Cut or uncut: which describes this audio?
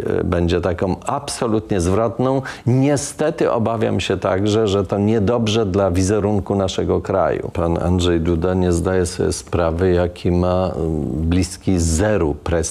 cut